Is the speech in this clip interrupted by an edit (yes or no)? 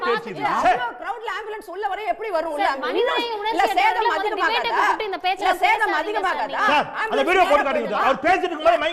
no